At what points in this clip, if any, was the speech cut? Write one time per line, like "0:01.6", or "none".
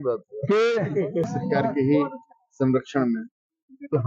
0:01.3